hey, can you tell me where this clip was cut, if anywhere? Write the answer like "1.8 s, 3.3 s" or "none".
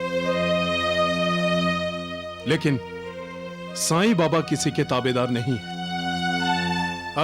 none